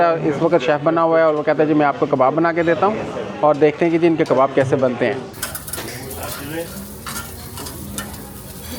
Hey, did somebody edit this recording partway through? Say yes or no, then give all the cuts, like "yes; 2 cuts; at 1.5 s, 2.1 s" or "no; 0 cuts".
yes; 1 cut; at 5.3 s